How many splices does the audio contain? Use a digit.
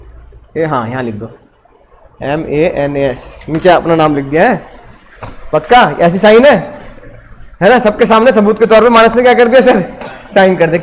0